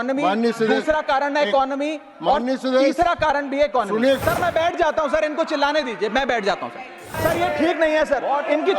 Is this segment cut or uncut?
cut